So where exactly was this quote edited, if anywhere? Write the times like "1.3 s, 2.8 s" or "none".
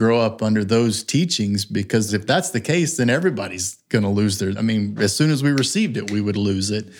2.1 s, 4.9 s